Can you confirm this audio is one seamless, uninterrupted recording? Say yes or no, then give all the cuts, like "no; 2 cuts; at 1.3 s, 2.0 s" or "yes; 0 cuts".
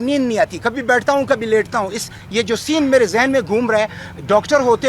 yes; 0 cuts